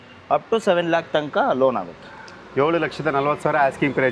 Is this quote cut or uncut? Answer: uncut